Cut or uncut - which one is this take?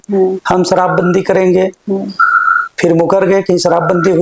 uncut